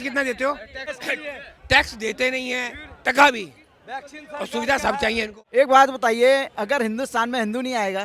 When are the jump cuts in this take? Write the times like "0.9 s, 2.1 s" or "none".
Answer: 1.0 s, 5.4 s